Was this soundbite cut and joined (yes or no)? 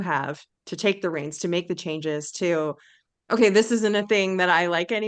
no